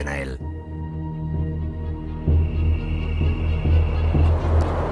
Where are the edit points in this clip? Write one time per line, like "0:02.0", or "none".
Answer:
none

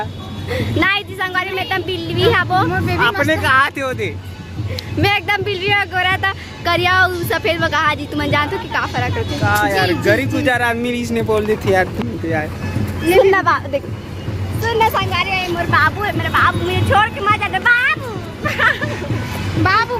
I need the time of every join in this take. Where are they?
none

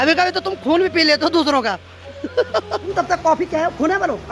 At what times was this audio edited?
0:02.9

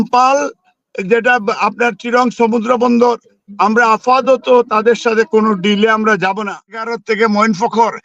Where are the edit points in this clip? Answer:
0:07.0

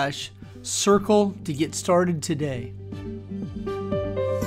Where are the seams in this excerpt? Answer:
0:02.7

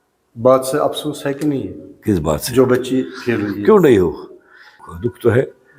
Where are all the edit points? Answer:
0:04.8

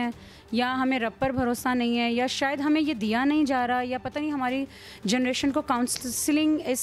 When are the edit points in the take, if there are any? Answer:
none

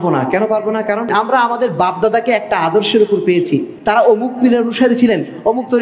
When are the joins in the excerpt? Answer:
0:01.1
0:03.7

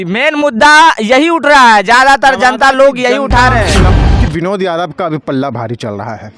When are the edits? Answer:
0:03.9

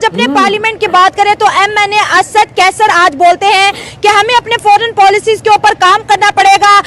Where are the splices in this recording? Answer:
none

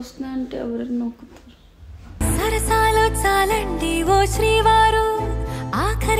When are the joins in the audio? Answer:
none

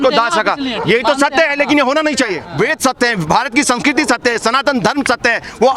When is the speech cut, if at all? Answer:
0:02.4

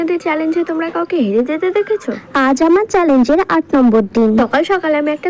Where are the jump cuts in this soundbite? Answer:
none

